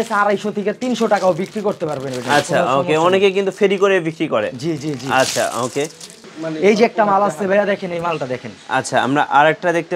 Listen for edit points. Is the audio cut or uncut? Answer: uncut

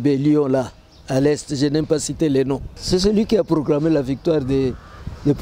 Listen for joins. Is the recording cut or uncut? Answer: cut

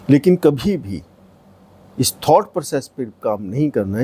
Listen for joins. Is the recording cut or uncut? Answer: uncut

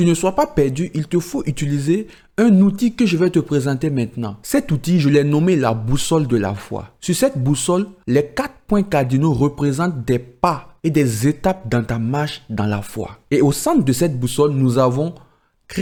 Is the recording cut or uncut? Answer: uncut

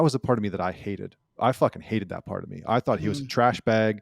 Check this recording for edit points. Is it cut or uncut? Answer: uncut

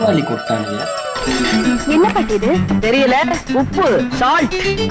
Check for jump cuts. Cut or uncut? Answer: uncut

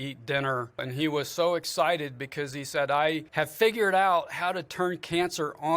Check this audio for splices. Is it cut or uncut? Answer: cut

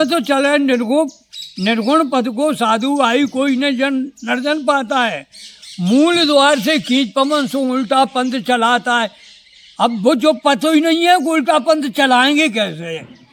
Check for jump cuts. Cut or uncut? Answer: uncut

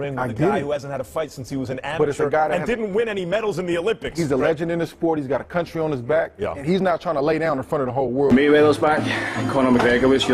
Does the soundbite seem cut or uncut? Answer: cut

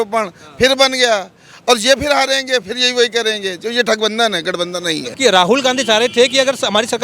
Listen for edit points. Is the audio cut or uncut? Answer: cut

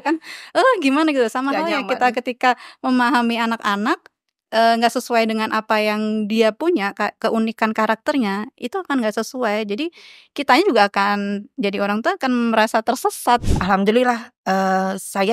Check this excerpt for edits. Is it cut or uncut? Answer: cut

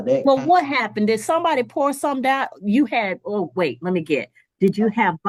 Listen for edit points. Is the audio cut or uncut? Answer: uncut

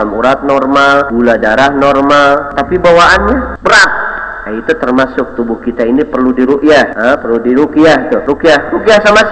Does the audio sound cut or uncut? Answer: cut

